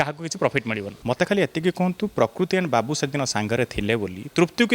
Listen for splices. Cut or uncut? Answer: cut